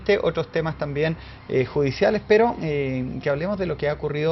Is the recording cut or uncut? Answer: cut